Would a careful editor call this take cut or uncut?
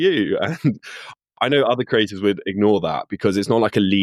uncut